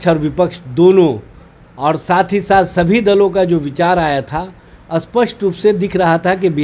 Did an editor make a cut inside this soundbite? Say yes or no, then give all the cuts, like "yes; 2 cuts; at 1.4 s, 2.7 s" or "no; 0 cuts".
no; 0 cuts